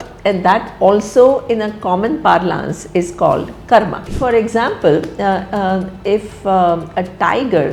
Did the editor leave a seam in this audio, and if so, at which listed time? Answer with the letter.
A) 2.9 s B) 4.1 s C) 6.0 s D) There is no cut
B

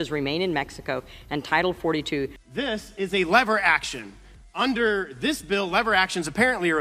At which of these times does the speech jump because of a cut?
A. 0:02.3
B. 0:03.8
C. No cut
C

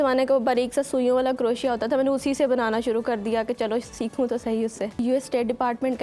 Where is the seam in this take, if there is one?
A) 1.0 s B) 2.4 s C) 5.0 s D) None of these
C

